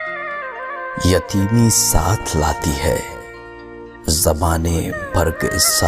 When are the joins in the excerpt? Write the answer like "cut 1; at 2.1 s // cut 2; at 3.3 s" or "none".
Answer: cut 1; at 1.0 s